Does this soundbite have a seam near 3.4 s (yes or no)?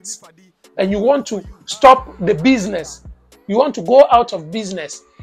no